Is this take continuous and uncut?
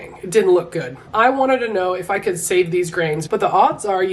no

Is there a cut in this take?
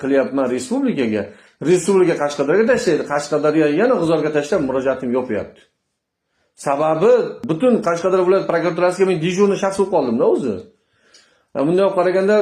no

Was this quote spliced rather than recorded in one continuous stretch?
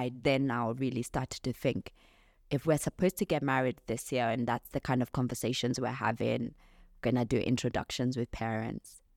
no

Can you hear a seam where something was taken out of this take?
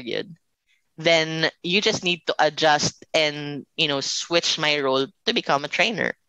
no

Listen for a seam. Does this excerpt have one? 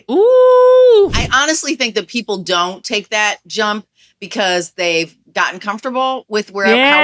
yes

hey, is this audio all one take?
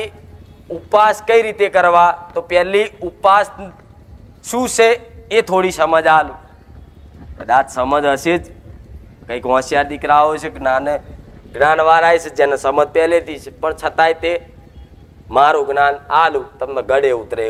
yes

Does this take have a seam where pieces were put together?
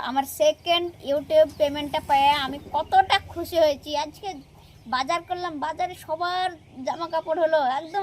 no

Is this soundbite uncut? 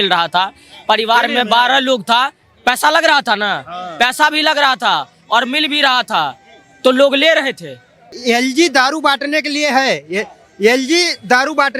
no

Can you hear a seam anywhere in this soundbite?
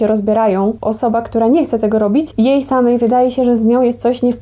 yes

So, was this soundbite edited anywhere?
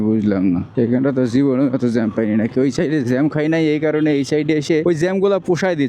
yes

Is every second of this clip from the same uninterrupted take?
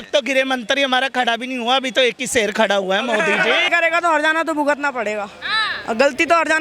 no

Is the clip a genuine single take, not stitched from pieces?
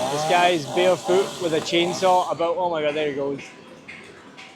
yes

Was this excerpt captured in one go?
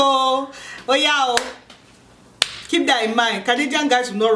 yes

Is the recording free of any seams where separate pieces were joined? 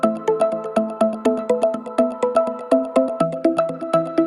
yes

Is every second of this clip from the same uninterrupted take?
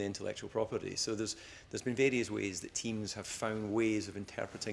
yes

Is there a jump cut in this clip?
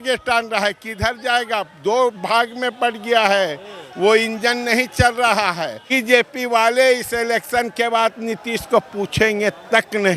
yes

